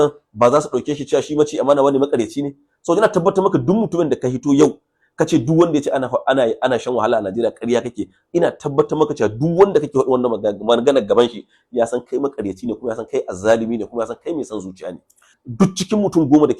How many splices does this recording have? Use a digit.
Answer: 1